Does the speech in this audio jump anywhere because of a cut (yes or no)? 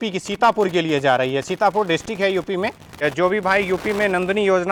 no